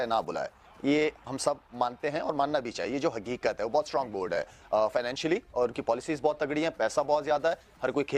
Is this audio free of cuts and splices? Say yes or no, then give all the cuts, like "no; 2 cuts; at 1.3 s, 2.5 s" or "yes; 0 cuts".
yes; 0 cuts